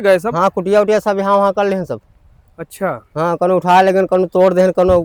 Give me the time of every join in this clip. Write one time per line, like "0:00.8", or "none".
none

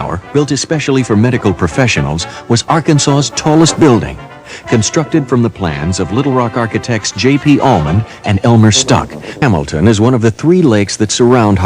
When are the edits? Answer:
0:09.4

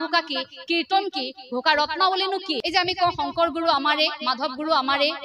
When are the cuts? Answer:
0:02.6

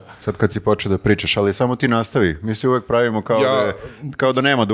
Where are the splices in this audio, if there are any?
none

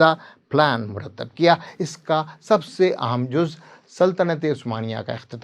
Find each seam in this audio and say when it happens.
none

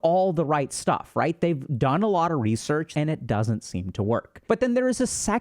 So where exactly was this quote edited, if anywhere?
0:02.9
0:04.3

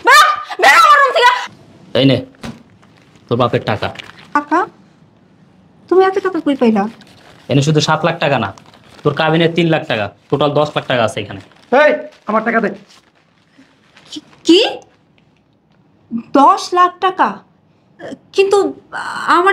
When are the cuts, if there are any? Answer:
0:01.4
0:04.4

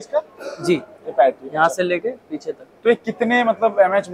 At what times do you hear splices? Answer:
none

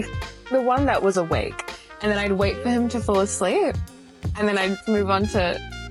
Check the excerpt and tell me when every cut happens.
none

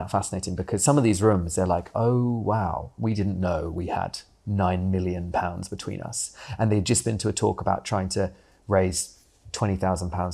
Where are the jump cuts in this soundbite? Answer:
none

